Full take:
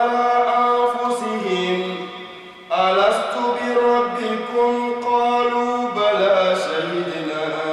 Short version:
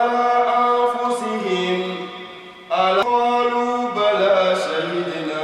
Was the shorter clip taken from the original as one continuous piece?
no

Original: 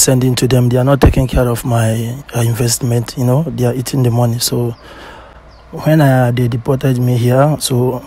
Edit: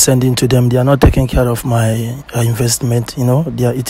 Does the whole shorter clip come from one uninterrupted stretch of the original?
yes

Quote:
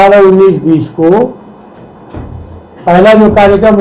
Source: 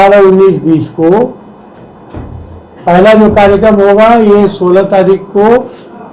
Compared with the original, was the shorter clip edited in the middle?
no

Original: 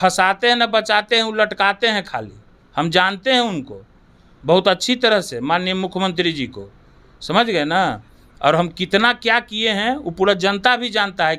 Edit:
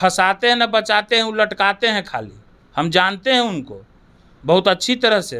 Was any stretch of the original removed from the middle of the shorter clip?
no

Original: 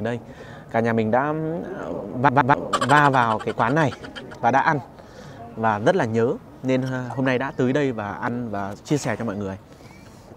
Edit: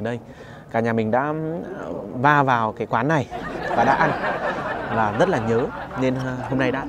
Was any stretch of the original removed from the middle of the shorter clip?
yes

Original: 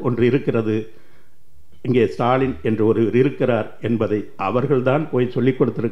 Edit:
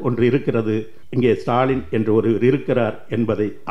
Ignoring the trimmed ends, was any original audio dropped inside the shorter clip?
yes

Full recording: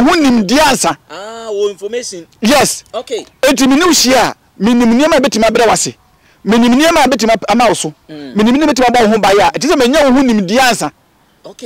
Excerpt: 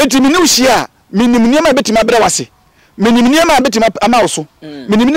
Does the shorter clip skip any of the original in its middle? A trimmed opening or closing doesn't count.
no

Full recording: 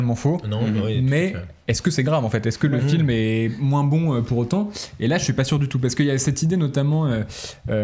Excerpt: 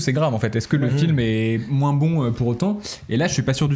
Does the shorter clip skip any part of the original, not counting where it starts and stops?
no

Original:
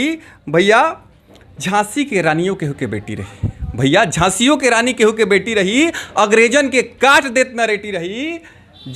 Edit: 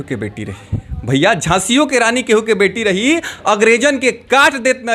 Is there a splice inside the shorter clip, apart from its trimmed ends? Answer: no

